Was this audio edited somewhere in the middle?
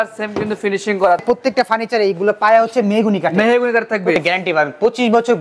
yes; 2 cuts; at 1.2 s, 4.1 s

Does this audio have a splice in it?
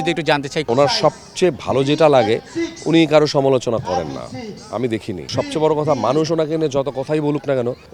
no; 0 cuts

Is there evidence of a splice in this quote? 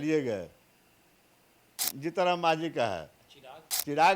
yes; 1 cut; at 1.7 s

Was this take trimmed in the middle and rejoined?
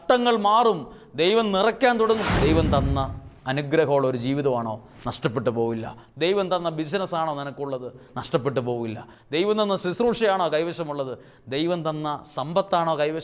yes; 1 cut; at 2.3 s

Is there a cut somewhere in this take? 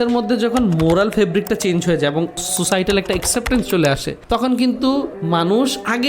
yes; 3 cuts; at 2.5 s, 4.1 s, 5.2 s

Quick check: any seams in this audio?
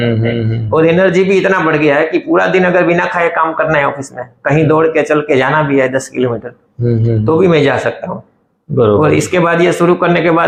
no; 0 cuts

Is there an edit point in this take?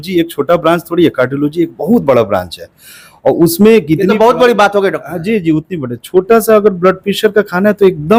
no; 0 cuts

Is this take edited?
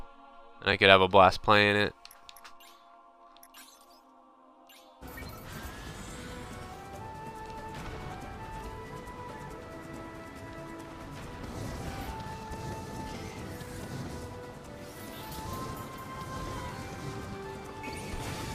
yes; 1 cut; at 4.4 s

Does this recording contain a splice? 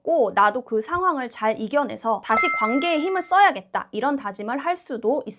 no; 0 cuts

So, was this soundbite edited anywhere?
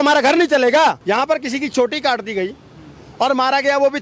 yes; 1 cut; at 1.0 s

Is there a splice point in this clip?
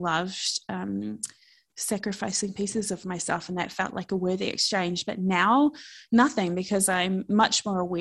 no; 0 cuts

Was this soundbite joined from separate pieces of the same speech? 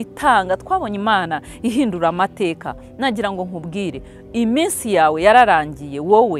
no; 0 cuts

